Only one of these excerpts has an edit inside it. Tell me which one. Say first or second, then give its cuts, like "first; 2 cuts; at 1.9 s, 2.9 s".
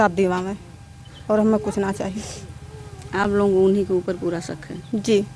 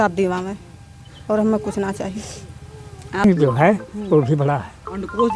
second; 1 cut; at 3.2 s